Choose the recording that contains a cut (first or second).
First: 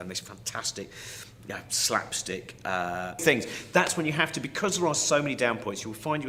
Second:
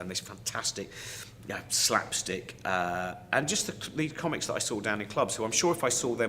second